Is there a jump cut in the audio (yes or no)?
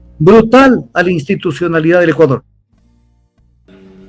no